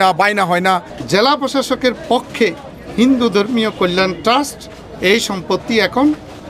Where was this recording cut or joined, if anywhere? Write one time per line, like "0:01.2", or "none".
0:00.9